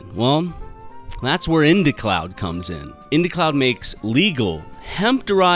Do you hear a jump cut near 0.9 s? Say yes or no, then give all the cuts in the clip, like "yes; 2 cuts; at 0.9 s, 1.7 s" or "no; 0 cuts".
no; 1 cut; at 2.9 s